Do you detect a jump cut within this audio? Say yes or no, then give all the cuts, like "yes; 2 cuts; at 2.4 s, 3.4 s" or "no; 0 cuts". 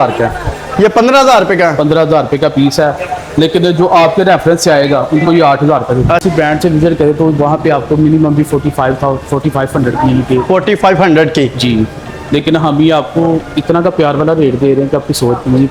yes; 1 cut; at 6.2 s